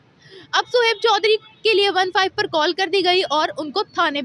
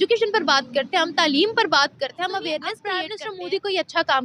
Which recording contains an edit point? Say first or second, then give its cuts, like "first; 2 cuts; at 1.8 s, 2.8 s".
second; 1 cut; at 3.1 s